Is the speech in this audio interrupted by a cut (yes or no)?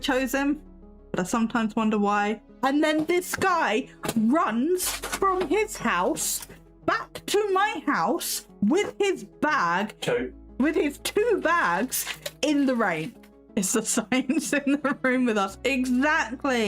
yes